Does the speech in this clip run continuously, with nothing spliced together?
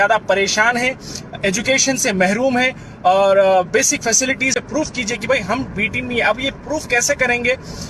no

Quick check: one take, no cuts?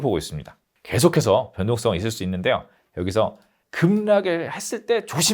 no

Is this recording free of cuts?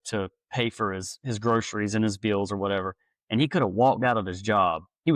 yes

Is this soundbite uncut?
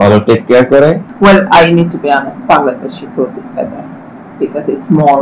no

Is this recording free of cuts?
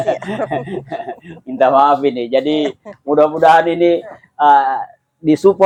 yes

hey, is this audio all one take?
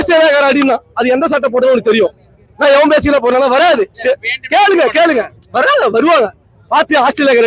yes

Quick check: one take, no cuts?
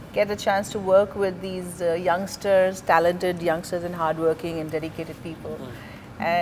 yes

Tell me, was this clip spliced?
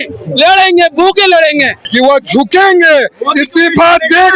yes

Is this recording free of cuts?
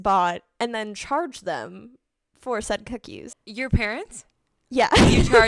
no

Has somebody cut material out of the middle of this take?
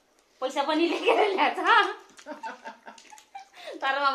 no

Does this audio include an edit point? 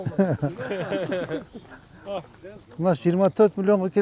no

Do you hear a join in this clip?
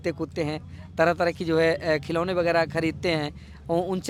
no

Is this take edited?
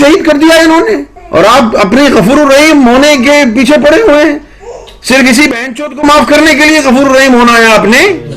yes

